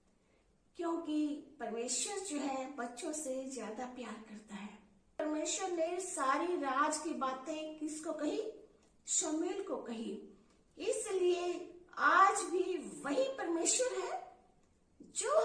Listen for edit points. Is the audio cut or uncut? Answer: cut